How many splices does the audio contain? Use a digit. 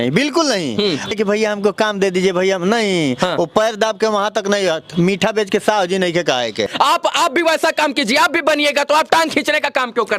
2